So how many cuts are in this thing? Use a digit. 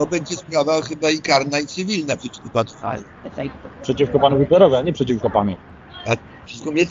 0